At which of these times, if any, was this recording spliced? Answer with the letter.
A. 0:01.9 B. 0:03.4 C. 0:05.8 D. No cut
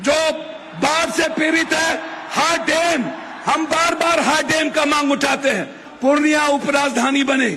C